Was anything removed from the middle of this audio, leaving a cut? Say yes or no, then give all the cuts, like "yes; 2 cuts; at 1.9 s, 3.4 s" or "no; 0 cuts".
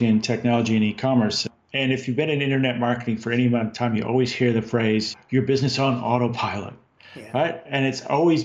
yes; 2 cuts; at 1.4 s, 5.1 s